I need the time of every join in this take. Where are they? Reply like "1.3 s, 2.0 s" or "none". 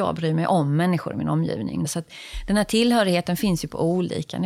1.9 s